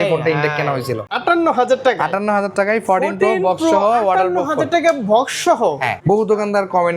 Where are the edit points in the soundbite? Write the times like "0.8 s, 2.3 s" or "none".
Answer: 1.0 s, 5.9 s

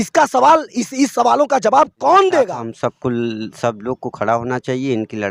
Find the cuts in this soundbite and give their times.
2.6 s

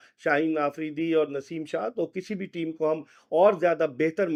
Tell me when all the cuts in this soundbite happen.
none

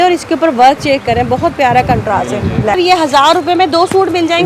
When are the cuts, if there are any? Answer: 2.8 s

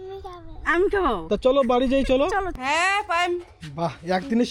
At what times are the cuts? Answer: 2.6 s

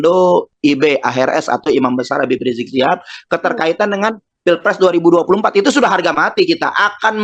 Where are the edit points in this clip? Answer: none

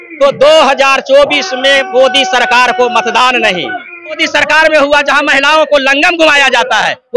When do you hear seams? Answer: 4.2 s

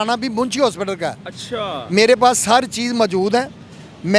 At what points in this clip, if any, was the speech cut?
none

